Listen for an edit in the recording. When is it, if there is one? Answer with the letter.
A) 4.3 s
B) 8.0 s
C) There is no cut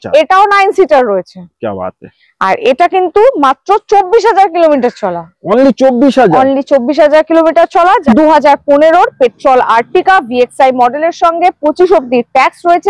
B